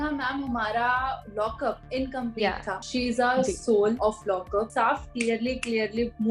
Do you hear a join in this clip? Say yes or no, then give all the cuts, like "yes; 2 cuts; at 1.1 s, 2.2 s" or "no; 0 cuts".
yes; 3 cuts; at 1.5 s, 2.8 s, 4.5 s